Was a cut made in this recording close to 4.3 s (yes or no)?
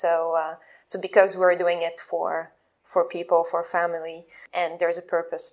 yes